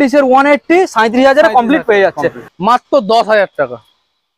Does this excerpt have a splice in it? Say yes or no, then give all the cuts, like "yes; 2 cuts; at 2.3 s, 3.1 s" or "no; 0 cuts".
yes; 1 cut; at 2.5 s